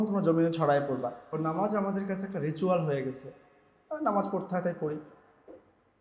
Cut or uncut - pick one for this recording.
cut